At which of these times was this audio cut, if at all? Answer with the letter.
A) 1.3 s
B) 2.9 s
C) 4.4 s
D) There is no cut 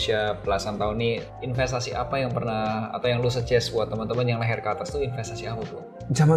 A